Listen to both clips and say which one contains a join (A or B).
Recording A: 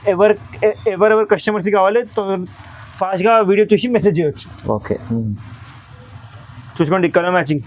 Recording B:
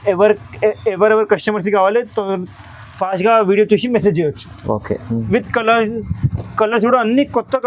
B